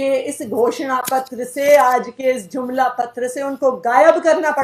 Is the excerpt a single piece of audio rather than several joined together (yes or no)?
yes